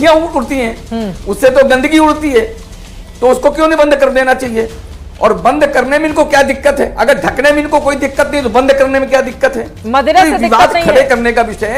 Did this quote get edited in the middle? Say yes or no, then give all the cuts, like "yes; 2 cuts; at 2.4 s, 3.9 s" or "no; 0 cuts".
no; 0 cuts